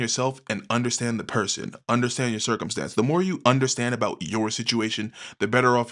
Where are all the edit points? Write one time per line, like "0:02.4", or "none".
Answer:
none

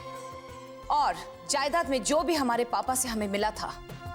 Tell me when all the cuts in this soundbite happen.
0:01.3

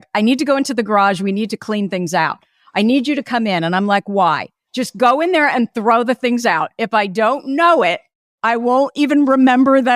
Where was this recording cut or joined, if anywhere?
0:08.3

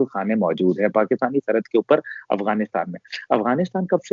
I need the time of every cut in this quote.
none

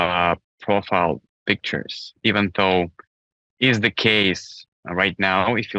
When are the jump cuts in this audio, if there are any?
none

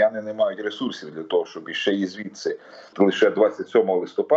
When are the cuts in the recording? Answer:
0:02.9

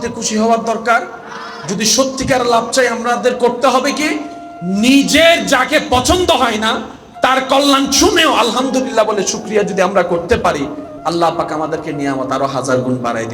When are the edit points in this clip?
none

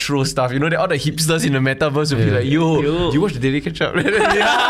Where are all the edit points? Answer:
none

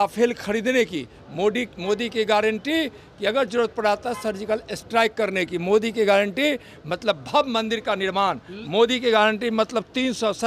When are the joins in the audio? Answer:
none

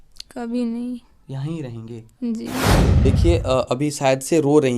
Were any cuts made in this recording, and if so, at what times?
0:02.9

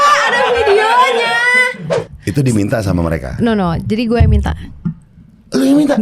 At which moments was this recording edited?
0:02.0

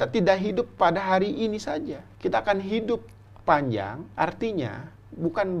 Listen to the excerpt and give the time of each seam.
0:02.0
0:04.0

